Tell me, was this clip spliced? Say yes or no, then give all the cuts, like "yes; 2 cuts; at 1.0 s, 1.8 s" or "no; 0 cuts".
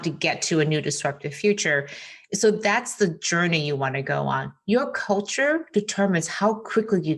no; 0 cuts